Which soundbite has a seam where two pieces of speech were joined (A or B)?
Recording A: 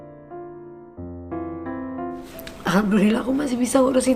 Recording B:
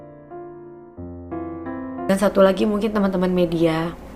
B